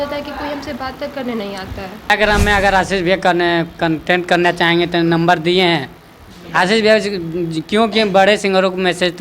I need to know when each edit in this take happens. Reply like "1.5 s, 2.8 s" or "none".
2.1 s